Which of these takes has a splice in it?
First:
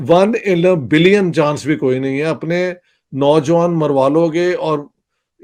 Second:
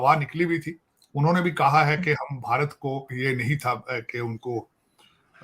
second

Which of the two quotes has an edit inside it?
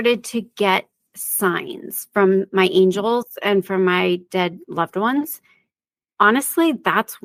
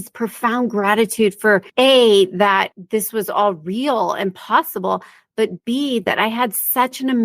second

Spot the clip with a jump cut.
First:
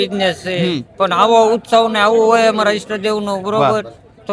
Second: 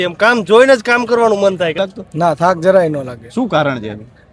second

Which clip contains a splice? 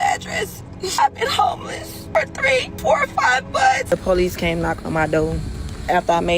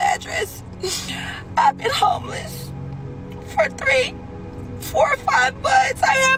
first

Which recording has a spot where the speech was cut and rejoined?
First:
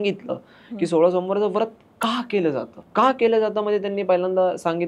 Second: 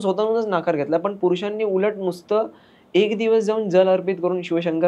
first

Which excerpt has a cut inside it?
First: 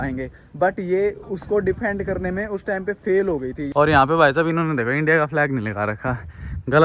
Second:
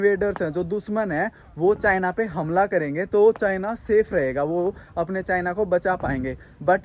first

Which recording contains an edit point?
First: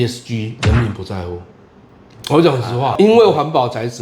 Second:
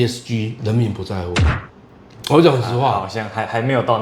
first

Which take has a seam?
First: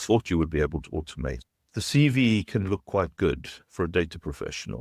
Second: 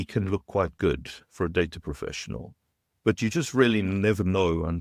first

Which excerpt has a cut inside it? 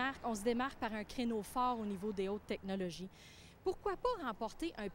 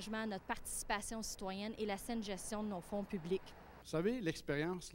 second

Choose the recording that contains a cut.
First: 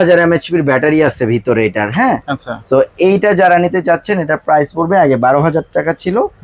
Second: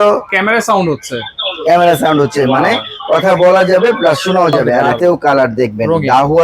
second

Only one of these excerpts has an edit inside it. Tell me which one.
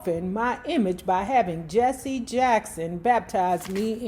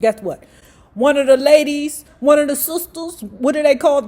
second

